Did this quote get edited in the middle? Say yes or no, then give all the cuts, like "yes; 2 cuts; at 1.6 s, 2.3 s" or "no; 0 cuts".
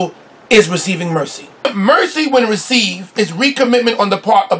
yes; 1 cut; at 1.4 s